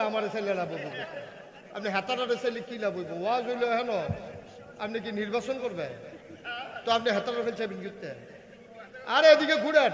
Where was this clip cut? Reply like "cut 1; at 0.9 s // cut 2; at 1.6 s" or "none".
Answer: none